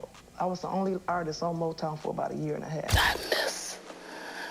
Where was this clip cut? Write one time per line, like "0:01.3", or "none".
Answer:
0:02.9